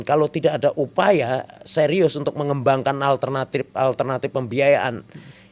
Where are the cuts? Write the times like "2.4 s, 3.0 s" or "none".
none

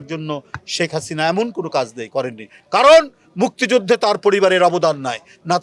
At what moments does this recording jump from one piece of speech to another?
none

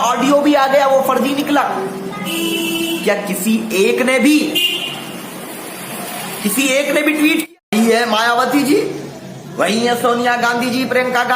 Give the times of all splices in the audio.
7.4 s

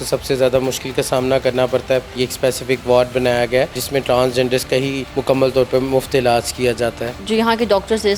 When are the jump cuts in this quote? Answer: 2.2 s, 3.8 s, 5.1 s, 7.1 s

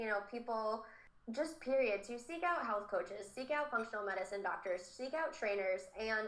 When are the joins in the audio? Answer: none

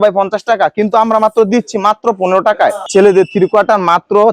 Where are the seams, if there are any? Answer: 2.8 s

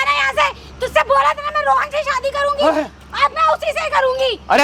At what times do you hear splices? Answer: none

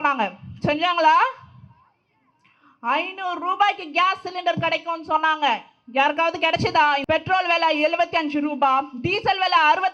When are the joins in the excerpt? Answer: 7.0 s

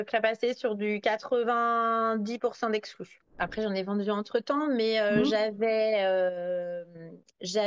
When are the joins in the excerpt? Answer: 3.4 s

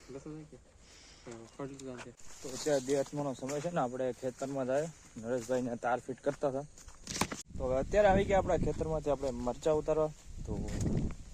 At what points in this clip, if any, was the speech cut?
2.2 s, 7.4 s

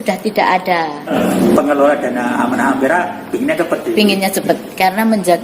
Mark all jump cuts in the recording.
1.0 s

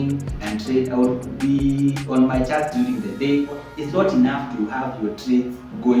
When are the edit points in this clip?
3.7 s

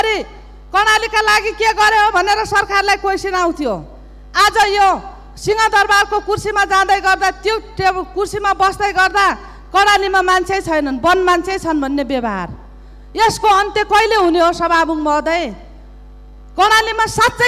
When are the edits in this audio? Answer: none

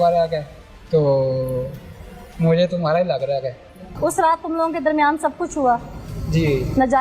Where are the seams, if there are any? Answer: 3.9 s

